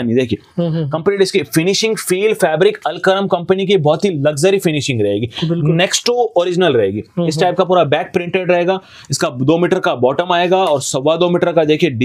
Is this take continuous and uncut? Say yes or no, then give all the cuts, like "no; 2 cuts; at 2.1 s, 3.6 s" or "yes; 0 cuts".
yes; 0 cuts